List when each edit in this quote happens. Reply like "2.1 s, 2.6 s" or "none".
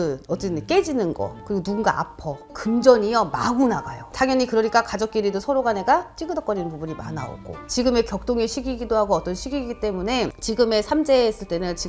2.6 s, 4.1 s, 7.6 s, 10.5 s